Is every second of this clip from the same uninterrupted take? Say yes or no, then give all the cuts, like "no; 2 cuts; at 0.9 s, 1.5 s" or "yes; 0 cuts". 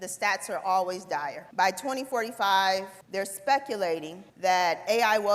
no; 3 cuts; at 1.4 s, 3.0 s, 4.2 s